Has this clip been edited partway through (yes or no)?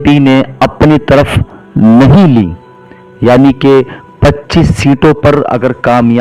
no